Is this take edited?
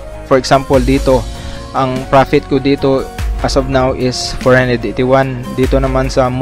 no; 0 cuts

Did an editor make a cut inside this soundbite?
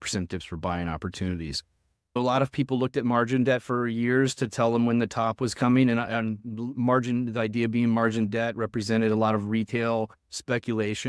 yes; 1 cut; at 2.2 s

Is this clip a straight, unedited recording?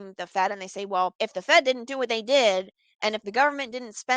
no; 1 cut; at 1.1 s

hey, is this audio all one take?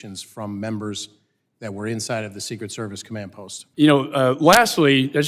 yes; 0 cuts

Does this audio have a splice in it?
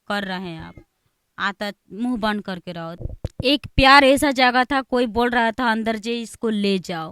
yes; 1 cut; at 2.9 s

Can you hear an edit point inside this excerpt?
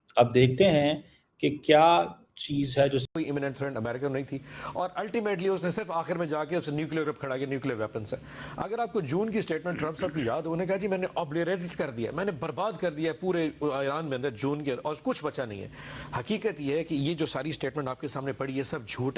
yes; 1 cut; at 3.1 s

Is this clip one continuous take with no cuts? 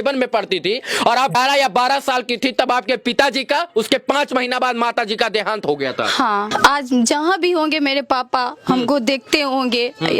no; 2 cuts; at 1.3 s, 6.5 s

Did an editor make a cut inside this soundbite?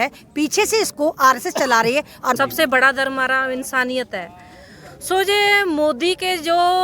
yes; 1 cut; at 2.4 s

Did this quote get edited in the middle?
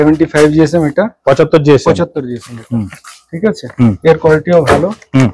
no; 0 cuts

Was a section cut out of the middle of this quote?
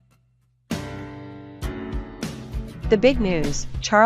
yes; 1 cut; at 2.9 s

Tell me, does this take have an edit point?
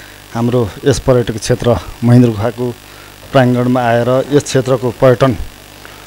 no; 0 cuts

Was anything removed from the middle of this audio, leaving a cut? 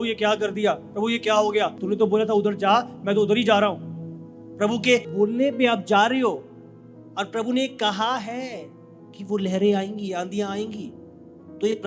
no; 0 cuts

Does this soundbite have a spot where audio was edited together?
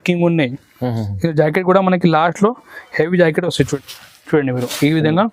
yes; 1 cut; at 3.8 s

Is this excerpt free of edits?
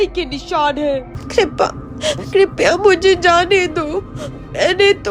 no; 1 cut; at 1.2 s

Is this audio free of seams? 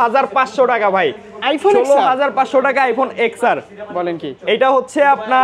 yes; 0 cuts

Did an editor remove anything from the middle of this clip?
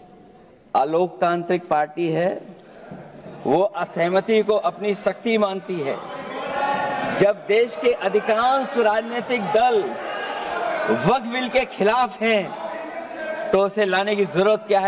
no; 0 cuts

